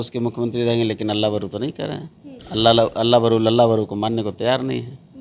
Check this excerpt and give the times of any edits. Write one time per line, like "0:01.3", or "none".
none